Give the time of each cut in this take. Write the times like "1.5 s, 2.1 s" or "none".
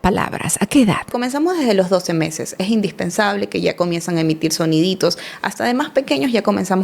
1.1 s

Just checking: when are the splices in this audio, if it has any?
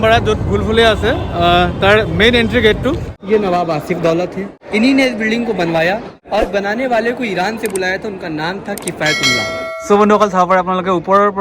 3.1 s, 4.6 s, 6.2 s, 9.7 s

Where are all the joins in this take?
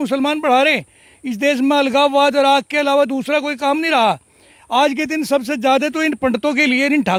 none

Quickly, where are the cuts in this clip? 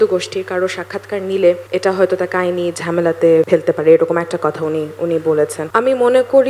1.6 s, 3.5 s, 5.6 s

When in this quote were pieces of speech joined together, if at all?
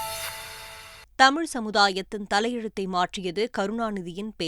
0.9 s

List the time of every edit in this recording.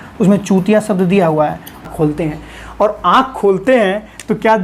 1.8 s

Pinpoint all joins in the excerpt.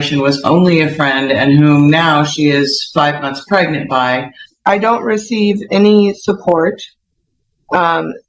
4.5 s

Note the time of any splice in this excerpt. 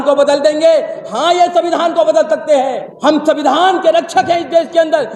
2.9 s

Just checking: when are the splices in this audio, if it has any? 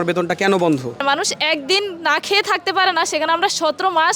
1.0 s

